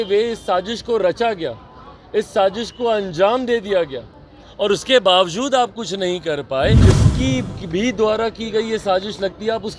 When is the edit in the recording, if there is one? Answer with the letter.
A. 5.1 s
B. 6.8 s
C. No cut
B